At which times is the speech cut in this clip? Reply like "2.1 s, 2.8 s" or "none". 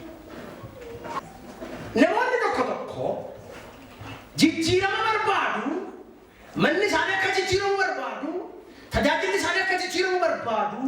1.2 s